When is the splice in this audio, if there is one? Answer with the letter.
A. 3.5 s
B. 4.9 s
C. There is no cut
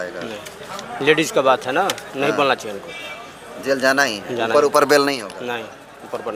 C